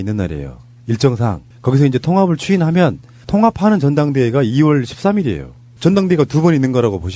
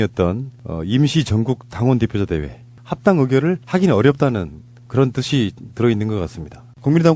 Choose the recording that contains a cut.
first; 1 cut; at 5.3 s

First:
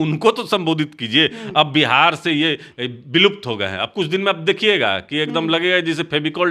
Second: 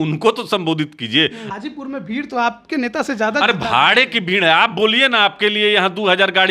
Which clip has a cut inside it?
second; 1 cut; at 1.4 s

